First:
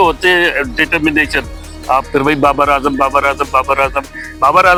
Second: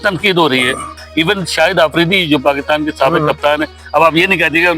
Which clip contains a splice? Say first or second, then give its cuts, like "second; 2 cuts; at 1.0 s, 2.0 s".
second; 1 cut; at 1.0 s